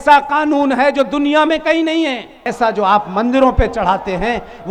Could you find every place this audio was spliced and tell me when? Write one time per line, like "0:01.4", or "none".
0:02.5